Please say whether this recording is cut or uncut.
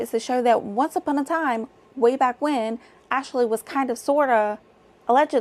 uncut